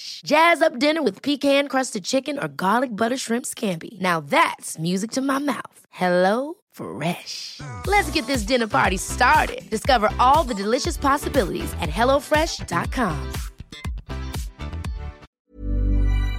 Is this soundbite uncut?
no; 1 cut; at 15.4 s

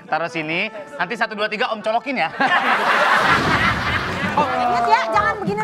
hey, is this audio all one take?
no; 1 cut; at 4.2 s

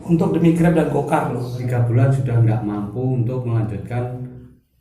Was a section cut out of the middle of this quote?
yes; 1 cut; at 1.7 s

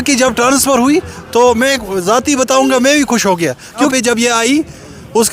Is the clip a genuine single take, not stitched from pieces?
no; 1 cut; at 3.8 s

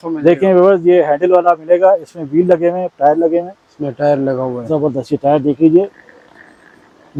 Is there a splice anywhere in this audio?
no; 0 cuts

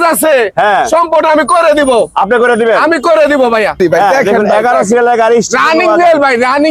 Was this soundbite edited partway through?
yes; 1 cut; at 3.8 s

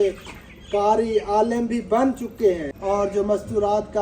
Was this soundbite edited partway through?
yes; 1 cut; at 2.7 s

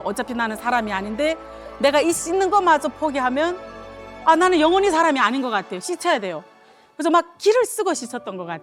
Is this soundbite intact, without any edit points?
yes; 0 cuts

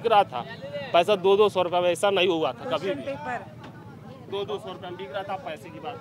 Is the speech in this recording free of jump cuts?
yes; 0 cuts

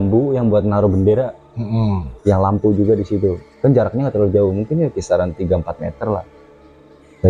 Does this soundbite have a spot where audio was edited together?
no; 0 cuts

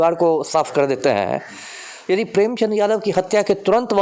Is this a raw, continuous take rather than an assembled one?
yes; 0 cuts

